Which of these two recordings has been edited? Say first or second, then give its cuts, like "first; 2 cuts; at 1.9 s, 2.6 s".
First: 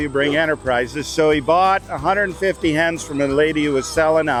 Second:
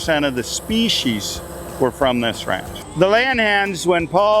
second; 1 cut; at 2.7 s